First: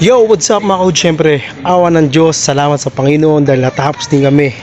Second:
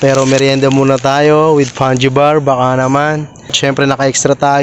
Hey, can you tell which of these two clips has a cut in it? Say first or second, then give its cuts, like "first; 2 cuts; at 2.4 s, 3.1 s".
second; 1 cut; at 3.5 s